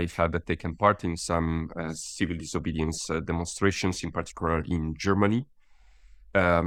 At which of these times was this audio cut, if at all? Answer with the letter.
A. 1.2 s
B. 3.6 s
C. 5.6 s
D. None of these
D